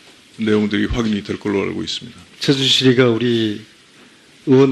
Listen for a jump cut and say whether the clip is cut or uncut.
uncut